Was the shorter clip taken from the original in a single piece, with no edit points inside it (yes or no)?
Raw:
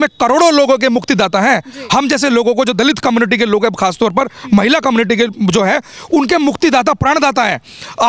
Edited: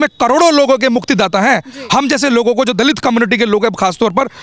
yes